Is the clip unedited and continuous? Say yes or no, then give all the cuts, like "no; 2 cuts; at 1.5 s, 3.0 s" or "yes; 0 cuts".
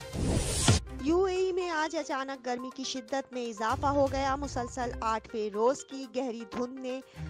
no; 1 cut; at 0.9 s